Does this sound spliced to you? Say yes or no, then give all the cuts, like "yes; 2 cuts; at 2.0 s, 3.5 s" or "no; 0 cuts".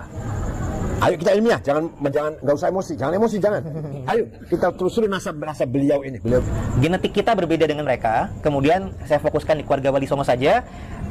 yes; 1 cut; at 6.4 s